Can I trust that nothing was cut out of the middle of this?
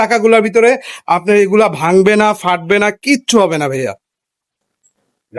yes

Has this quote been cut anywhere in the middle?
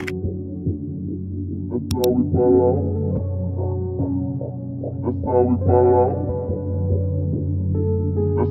no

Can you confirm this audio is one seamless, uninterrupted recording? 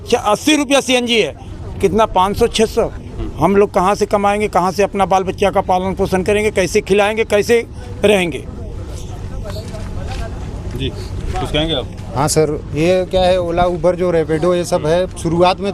yes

